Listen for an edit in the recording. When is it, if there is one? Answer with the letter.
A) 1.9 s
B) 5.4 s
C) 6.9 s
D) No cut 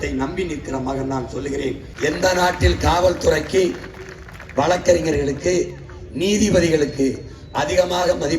A